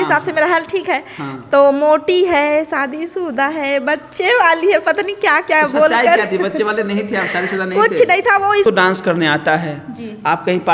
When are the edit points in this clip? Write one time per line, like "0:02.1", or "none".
0:08.6